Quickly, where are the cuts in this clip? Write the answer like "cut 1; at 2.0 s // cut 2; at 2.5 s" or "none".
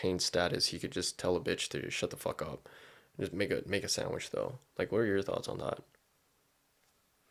none